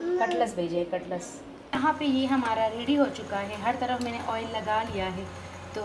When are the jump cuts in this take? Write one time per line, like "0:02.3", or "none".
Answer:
0:01.7